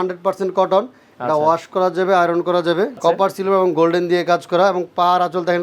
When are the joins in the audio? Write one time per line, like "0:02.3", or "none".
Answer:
0:03.0